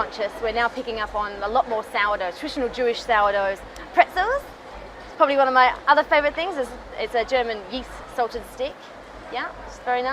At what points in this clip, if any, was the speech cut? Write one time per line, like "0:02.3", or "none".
0:03.7